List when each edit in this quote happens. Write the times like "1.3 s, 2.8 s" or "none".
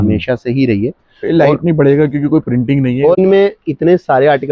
3.2 s